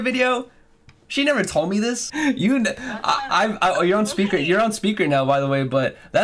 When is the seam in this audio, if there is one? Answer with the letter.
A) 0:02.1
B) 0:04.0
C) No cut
A